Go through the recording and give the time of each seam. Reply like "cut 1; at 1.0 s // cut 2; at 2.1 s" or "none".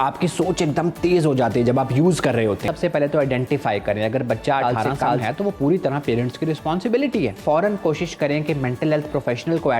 cut 1; at 2.7 s // cut 2; at 7.4 s